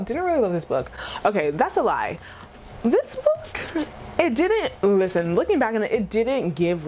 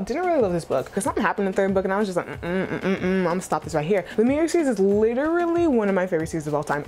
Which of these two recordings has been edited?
second; 2 cuts; at 0.9 s, 4.1 s

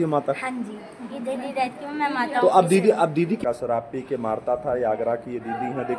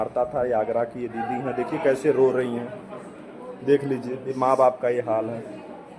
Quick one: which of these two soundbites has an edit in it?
first; 1 cut; at 3.4 s

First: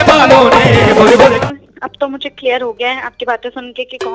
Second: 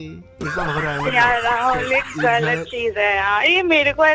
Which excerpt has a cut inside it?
first; 1 cut; at 1.4 s

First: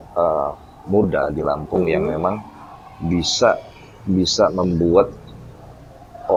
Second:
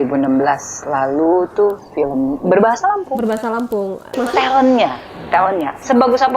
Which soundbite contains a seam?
second; 1 cut; at 4.1 s

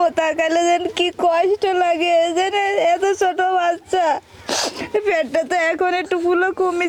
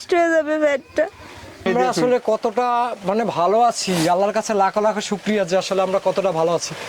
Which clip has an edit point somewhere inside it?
second; 1 cut; at 1.7 s

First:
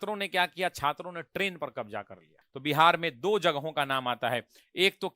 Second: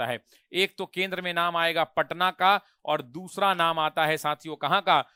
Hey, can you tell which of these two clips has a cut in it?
first; 1 cut; at 2.5 s

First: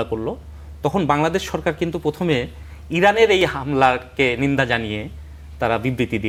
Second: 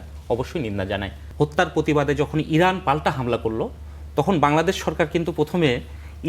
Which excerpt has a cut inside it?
second; 1 cut; at 1.2 s

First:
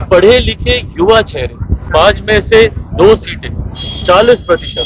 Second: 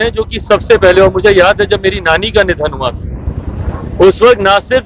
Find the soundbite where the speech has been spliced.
first; 1 cut; at 1.9 s

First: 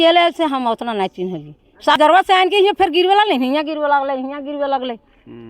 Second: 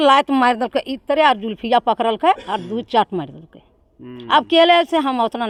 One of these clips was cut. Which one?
first; 1 cut; at 2.0 s

